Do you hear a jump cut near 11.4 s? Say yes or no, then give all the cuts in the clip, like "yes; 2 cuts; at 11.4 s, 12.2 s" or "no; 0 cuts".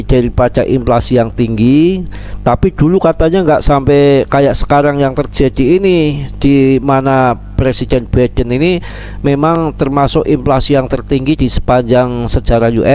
yes; 1 cut; at 11.4 s